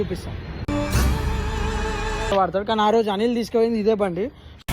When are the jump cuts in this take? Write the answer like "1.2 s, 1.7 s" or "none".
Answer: 2.3 s

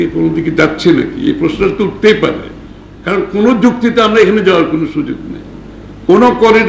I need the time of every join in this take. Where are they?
none

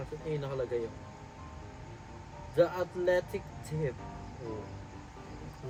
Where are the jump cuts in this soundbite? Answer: none

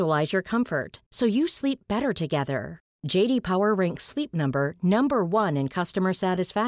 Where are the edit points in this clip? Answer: none

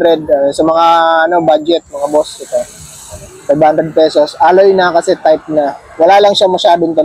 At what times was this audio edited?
none

